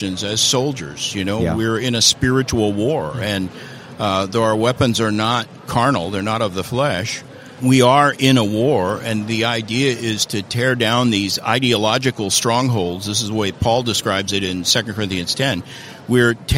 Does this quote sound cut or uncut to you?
cut